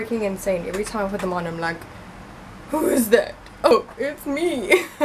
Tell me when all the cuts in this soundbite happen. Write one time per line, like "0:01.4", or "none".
0:03.7